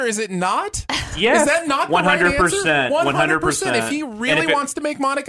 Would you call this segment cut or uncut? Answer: uncut